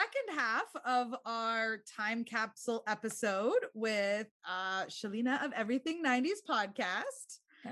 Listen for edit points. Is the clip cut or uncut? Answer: uncut